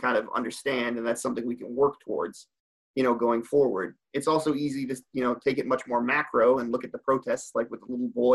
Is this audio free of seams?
yes; 0 cuts

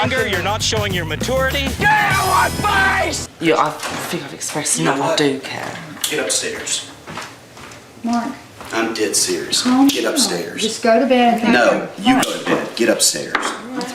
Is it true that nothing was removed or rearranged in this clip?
no; 1 cut; at 3.3 s

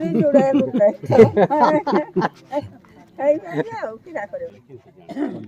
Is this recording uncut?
no; 1 cut; at 4.5 s

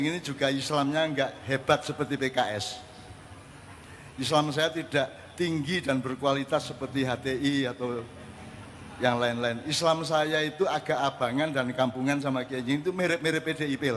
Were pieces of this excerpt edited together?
no; 0 cuts

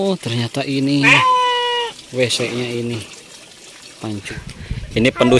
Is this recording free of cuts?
no; 1 cut; at 4.3 s

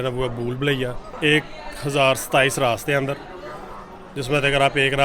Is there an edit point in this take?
yes; 1 cut; at 1.1 s

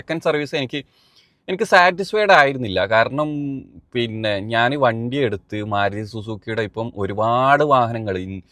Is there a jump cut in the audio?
no; 0 cuts

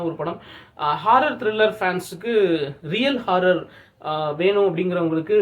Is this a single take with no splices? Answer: yes; 0 cuts

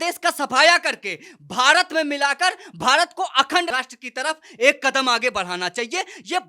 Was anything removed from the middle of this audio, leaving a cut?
no; 0 cuts

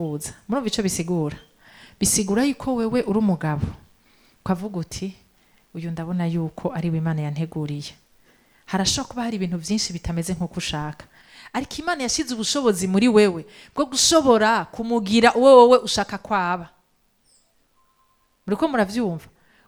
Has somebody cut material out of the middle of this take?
no; 0 cuts

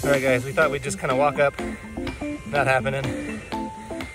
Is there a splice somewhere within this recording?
no; 0 cuts

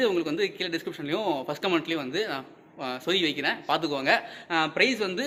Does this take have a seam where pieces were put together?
no; 0 cuts

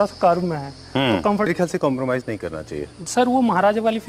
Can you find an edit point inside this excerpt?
yes; 1 cut; at 1.5 s

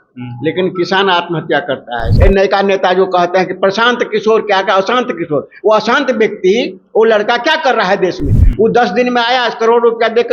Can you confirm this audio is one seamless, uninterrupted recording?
no; 2 cuts; at 2.1 s, 8.4 s

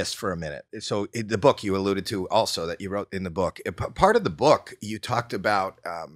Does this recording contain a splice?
no; 0 cuts

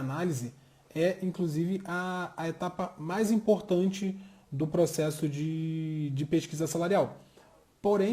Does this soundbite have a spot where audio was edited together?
no; 0 cuts

